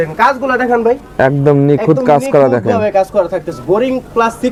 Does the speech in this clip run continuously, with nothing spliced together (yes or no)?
yes